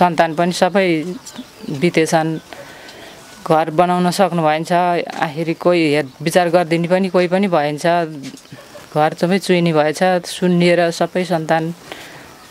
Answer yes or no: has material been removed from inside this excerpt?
no